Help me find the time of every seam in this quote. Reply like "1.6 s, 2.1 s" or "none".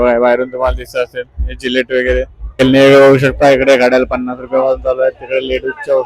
2.4 s